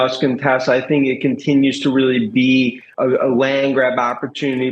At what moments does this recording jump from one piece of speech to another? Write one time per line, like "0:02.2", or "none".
0:02.8